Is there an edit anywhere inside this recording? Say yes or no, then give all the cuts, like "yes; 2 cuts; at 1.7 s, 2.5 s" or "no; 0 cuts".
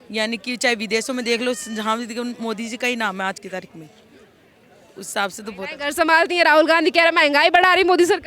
no; 0 cuts